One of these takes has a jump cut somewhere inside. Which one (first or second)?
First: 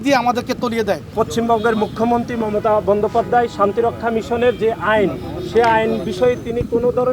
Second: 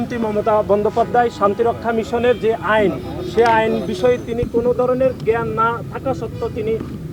first